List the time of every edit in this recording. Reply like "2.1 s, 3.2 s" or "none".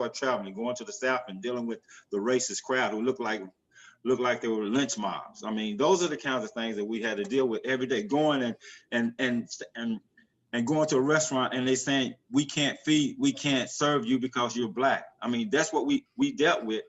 none